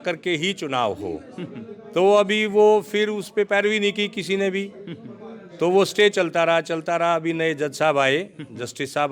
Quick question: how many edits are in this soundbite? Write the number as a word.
zero